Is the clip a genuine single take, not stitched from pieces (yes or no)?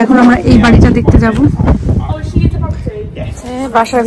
yes